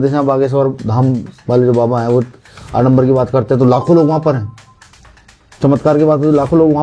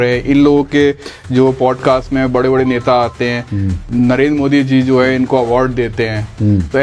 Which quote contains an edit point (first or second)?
second